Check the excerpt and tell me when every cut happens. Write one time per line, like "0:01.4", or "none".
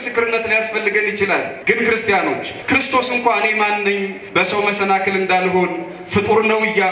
0:01.5
0:02.5
0:04.2